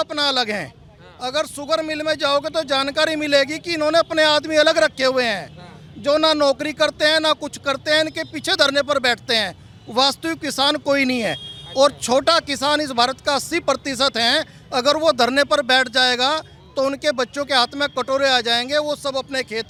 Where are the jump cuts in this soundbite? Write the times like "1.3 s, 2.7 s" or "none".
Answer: none